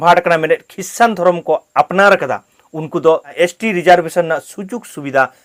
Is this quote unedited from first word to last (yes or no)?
yes